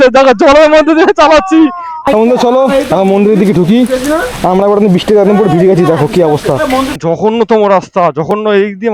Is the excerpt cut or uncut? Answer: cut